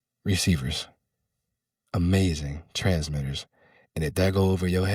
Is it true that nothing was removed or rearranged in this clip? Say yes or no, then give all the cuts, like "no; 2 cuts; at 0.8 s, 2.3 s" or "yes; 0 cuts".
yes; 0 cuts